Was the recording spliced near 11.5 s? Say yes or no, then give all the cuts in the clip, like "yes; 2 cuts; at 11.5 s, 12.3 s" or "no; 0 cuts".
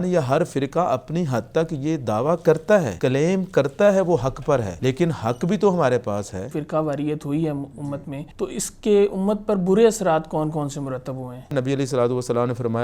yes; 5 cuts; at 2.9 s, 4.7 s, 6.6 s, 8.2 s, 11.5 s